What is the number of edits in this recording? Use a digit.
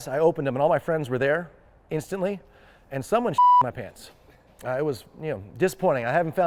0